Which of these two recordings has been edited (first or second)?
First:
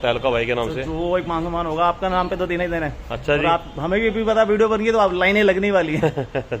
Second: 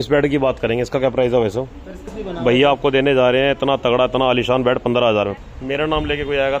second